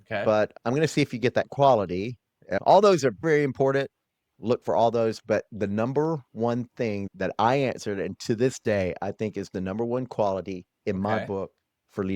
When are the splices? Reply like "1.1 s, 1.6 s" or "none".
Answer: 2.6 s